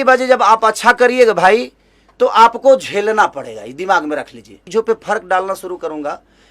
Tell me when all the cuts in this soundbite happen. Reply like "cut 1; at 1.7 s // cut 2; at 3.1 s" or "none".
cut 1; at 4.6 s